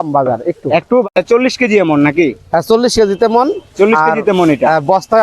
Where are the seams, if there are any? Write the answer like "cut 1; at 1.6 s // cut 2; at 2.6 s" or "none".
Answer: cut 1; at 1.2 s